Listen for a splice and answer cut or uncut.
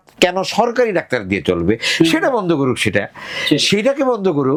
uncut